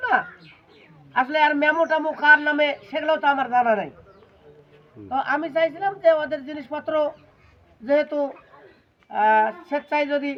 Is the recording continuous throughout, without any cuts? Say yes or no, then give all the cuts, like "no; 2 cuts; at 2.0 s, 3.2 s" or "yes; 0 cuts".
yes; 0 cuts